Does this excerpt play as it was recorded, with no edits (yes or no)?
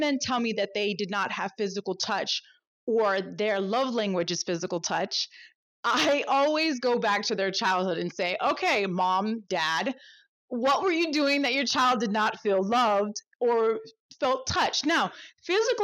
yes